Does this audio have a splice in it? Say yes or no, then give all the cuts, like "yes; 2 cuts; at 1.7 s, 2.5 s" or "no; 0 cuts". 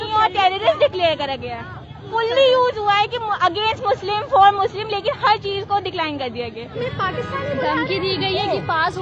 yes; 2 cuts; at 2.0 s, 6.7 s